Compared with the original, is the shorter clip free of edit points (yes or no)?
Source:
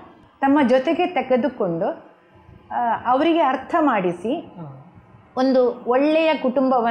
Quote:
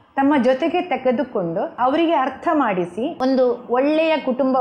no